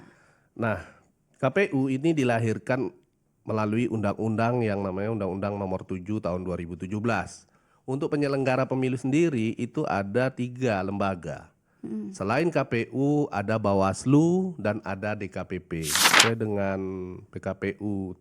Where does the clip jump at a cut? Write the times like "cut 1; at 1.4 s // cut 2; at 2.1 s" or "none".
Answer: cut 1; at 16.2 s